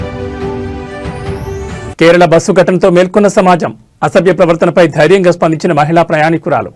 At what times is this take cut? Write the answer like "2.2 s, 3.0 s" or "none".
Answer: 1.2 s